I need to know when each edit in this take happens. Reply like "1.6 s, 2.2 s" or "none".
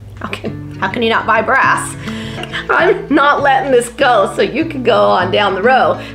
2.3 s